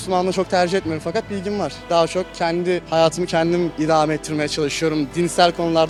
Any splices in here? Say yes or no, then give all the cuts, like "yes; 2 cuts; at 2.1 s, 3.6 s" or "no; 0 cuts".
no; 0 cuts